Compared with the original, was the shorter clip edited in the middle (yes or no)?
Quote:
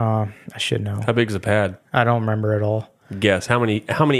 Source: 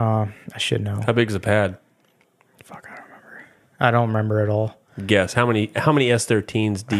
yes